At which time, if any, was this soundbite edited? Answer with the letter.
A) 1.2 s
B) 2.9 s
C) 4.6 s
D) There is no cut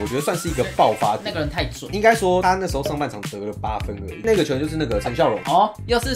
D